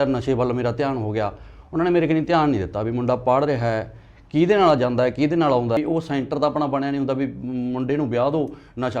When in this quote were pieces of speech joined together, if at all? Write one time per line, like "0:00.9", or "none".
0:05.8

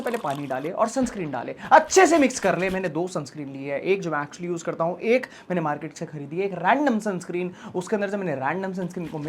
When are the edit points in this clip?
none

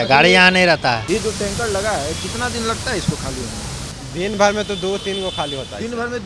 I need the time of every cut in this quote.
0:01.0
0:04.0

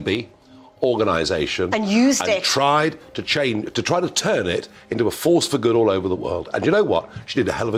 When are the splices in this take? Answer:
none

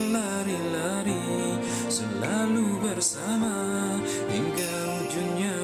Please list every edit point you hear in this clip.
none

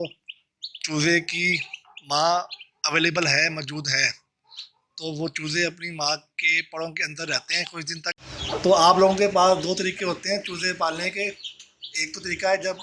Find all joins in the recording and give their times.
0:08.3

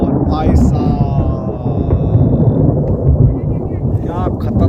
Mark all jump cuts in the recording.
none

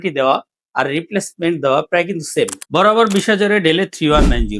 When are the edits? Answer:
0:02.5

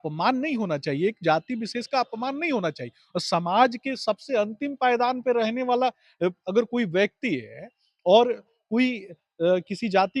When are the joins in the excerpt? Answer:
none

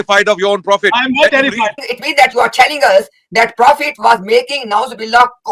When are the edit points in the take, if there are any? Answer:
0:01.9

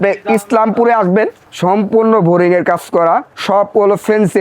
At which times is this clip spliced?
0:01.5
0:03.3

